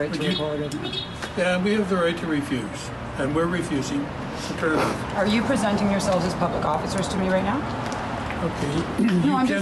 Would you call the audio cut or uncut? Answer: uncut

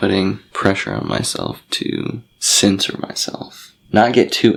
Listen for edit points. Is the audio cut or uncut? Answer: uncut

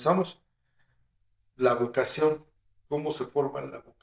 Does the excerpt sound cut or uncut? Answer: uncut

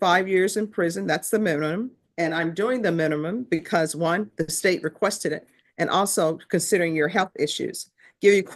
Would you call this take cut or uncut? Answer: uncut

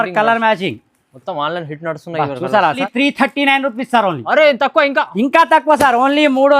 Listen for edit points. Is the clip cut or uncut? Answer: cut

